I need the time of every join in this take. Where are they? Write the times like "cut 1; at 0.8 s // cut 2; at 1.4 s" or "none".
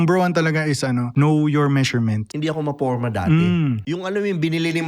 cut 1; at 1.1 s // cut 2; at 2.3 s // cut 3; at 3.8 s